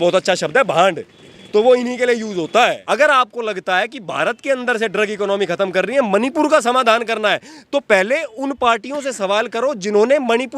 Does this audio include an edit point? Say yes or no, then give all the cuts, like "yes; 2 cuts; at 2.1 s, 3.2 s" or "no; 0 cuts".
yes; 1 cut; at 2.8 s